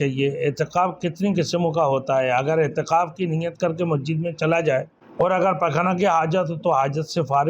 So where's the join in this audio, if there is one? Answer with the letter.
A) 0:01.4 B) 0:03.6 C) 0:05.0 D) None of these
C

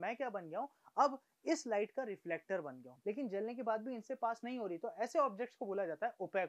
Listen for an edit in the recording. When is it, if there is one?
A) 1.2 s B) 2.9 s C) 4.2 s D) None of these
B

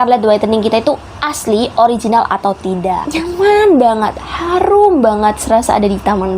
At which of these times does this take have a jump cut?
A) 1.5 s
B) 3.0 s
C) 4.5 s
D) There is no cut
B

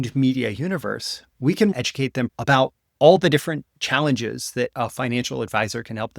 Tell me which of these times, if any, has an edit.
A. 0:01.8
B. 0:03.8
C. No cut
A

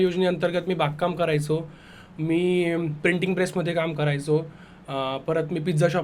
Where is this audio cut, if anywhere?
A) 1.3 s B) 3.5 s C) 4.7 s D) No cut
D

